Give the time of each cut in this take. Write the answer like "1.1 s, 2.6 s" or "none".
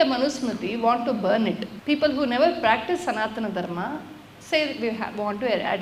none